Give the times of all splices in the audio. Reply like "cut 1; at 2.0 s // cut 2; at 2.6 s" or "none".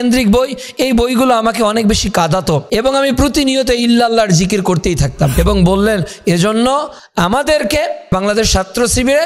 cut 1; at 2.6 s // cut 2; at 5.4 s // cut 3; at 8.1 s